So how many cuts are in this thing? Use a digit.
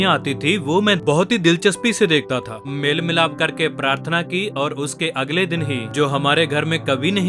3